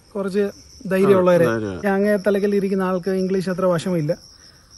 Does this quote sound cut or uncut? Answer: cut